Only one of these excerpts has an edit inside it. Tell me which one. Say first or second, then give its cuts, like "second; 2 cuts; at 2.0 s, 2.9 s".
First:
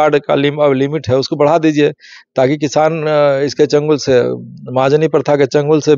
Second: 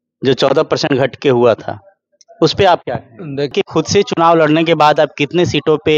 second; 1 cut; at 3.5 s